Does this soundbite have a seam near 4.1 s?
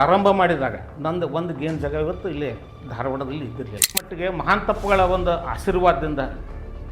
yes; 1 cut; at 4.1 s

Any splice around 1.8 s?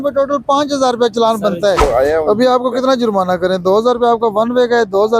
yes; 1 cut; at 1.8 s

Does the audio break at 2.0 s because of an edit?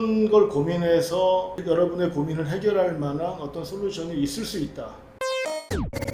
no; 1 cut; at 5.2 s

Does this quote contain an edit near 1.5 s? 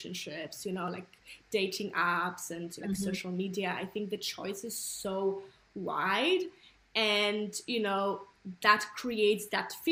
no; 0 cuts

